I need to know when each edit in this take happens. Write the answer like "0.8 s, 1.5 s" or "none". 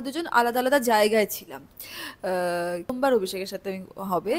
2.9 s